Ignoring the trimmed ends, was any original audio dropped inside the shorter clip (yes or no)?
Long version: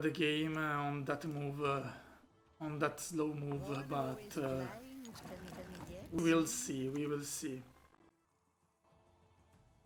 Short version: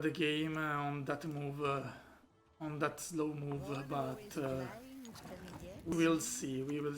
yes